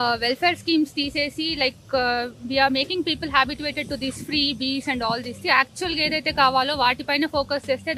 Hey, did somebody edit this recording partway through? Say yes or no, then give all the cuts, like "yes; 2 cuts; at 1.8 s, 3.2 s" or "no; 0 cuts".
no; 0 cuts